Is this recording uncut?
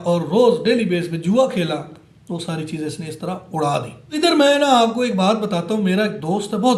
no; 1 cut; at 4.0 s

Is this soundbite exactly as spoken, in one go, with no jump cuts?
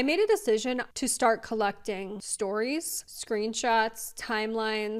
no; 2 cuts; at 0.9 s, 2.2 s

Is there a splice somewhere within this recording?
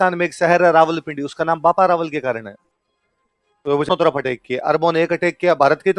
yes; 1 cut; at 3.9 s

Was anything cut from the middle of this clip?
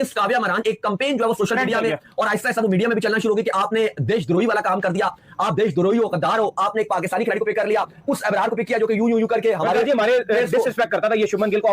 no; 0 cuts

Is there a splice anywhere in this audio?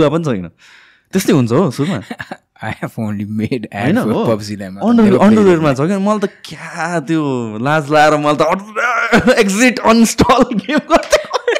no; 0 cuts

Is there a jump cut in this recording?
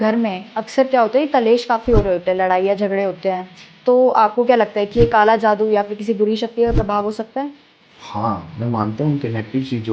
no; 0 cuts

